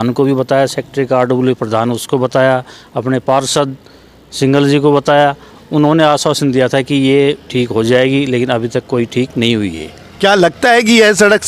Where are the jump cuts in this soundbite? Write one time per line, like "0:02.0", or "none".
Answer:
none